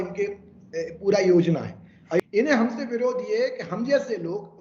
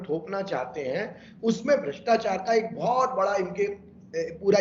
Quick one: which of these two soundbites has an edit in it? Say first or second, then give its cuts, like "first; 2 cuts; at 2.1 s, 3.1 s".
first; 1 cut; at 2.2 s